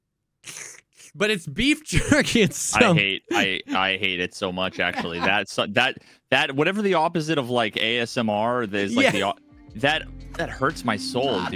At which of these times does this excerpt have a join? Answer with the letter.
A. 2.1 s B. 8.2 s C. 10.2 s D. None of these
C